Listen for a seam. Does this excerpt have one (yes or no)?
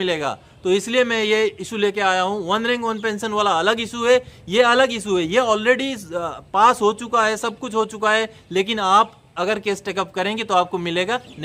no